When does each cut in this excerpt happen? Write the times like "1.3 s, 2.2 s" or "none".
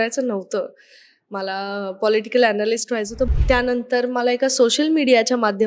3.3 s